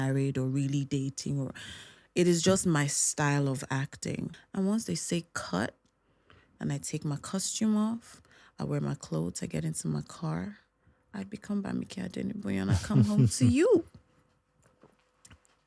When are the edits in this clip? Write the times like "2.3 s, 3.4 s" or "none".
4.3 s